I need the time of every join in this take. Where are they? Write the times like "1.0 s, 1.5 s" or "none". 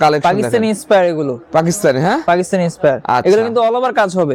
none